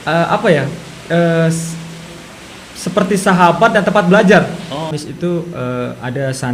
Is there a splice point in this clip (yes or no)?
yes